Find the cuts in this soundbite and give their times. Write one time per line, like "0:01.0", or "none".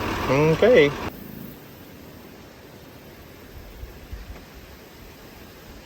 0:01.1